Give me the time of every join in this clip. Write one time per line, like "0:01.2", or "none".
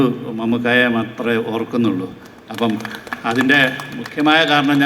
none